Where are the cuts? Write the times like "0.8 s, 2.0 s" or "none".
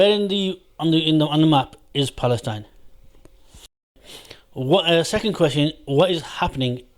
3.7 s